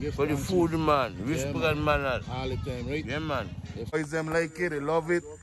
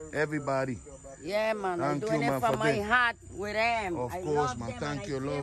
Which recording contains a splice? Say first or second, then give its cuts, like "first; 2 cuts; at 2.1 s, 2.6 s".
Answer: first; 1 cut; at 3.9 s